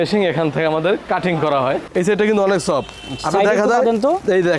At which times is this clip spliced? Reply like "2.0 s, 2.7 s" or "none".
1.9 s